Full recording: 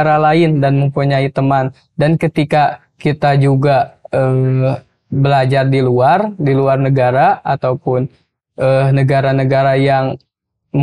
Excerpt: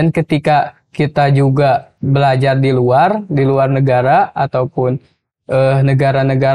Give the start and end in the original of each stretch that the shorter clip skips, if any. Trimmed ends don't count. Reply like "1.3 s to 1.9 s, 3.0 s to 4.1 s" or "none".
4.0 s to 5.0 s